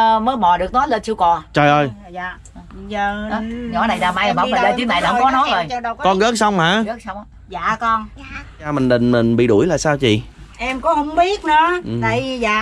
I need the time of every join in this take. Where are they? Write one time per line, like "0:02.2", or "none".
0:08.7